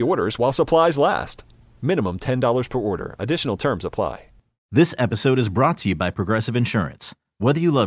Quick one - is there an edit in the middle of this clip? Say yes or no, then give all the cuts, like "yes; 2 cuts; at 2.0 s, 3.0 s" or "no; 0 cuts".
yes; 1 cut; at 4.6 s